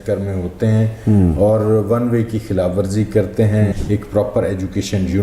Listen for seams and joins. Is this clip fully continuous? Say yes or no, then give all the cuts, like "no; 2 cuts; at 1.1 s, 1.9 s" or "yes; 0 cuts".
no; 1 cut; at 3.8 s